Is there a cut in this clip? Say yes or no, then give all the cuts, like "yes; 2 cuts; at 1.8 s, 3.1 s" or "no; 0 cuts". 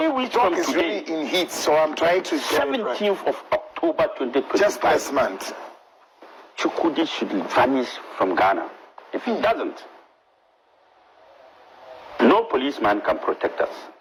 no; 0 cuts